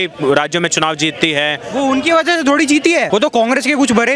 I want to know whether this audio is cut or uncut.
cut